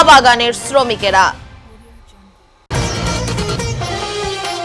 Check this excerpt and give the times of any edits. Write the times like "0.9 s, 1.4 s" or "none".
2.5 s

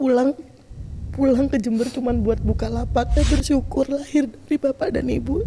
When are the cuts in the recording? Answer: 3.1 s

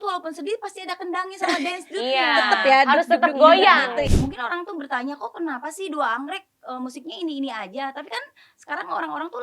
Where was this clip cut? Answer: 4.1 s

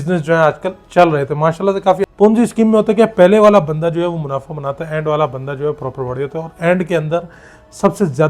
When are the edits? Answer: 2.1 s

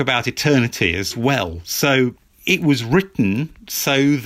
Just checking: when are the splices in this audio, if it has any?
2.3 s

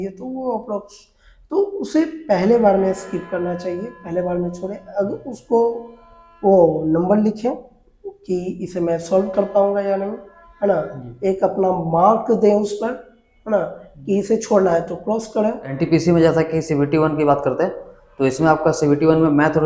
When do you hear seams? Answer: 15.7 s

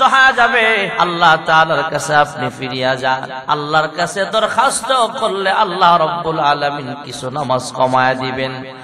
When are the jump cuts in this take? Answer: 0.9 s, 3.3 s

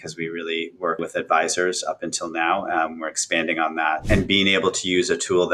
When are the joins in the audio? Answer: 1.0 s, 4.0 s

